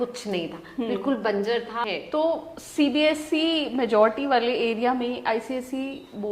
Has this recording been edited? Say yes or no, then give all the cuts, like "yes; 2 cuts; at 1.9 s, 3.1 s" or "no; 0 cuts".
yes; 1 cut; at 1.9 s